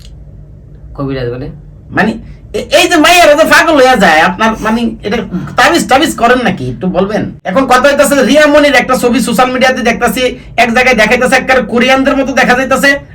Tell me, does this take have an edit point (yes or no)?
yes